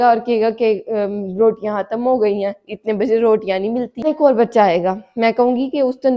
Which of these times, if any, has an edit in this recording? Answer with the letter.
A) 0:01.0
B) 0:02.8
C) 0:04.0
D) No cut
C